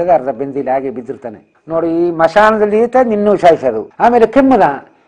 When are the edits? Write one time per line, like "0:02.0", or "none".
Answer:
0:01.4
0:03.9